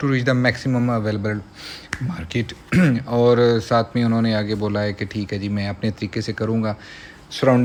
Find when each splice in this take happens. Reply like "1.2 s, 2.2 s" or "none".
none